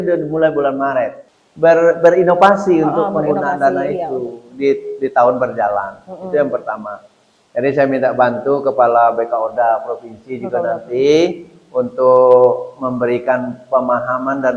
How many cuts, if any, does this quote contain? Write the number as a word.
one